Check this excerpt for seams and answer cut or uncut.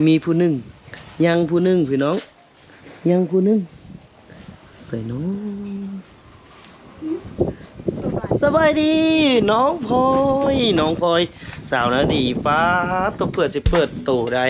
uncut